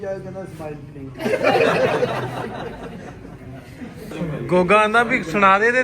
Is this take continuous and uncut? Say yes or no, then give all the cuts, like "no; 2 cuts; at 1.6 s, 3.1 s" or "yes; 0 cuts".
no; 1 cut; at 4.1 s